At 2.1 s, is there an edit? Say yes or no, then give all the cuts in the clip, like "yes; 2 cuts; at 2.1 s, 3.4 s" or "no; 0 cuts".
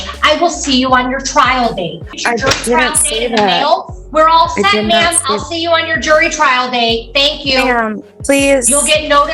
yes; 1 cut; at 2.1 s